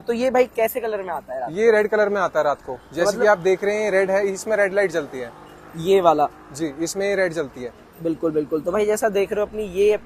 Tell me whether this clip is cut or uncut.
uncut